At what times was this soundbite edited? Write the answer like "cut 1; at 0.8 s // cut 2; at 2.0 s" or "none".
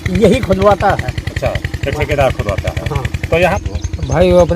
cut 1; at 3.6 s